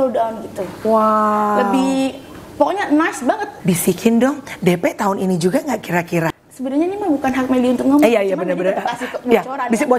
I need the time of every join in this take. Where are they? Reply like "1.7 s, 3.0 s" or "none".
3.5 s, 6.3 s

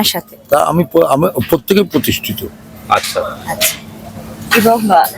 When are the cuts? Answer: none

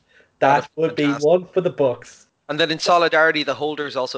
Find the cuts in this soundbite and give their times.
2.3 s

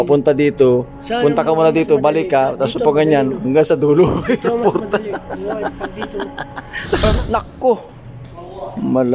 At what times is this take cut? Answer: 7.0 s

